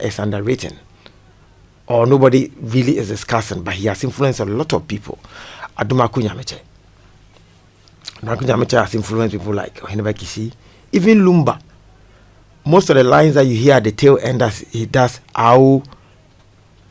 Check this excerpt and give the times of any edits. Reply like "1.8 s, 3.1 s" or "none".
none